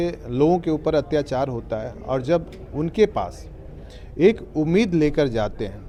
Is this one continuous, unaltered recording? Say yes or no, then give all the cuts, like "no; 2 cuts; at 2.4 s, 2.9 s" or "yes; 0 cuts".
yes; 0 cuts